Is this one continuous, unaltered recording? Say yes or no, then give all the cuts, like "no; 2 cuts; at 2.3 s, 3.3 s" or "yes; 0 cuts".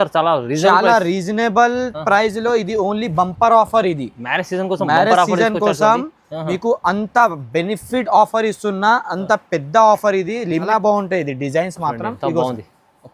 no; 1 cut; at 10.7 s